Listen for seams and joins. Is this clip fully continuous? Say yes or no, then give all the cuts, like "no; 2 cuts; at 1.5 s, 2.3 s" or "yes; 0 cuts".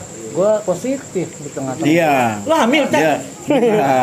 yes; 0 cuts